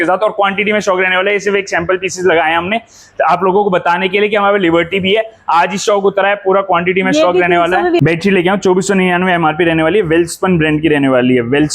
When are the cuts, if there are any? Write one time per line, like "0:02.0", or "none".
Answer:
0:08.0